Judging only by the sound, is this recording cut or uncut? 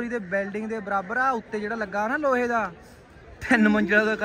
uncut